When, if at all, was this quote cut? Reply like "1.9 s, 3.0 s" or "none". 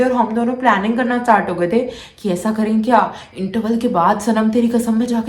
none